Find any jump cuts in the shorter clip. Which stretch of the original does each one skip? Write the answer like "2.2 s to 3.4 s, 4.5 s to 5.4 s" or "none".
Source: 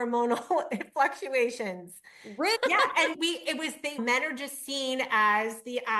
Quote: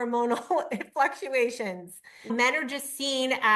2.2 s to 3.8 s